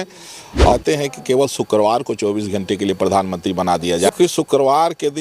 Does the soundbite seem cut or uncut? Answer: cut